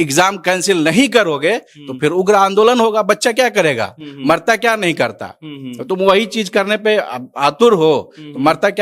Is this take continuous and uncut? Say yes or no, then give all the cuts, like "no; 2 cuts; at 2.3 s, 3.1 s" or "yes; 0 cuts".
yes; 0 cuts